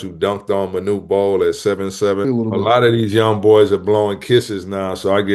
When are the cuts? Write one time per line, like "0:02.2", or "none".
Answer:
0:02.3